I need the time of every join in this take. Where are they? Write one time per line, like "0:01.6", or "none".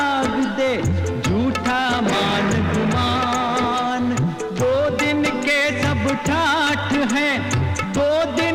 none